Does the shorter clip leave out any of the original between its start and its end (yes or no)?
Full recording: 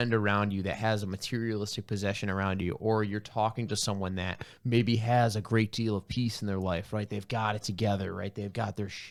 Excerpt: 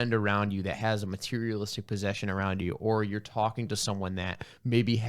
no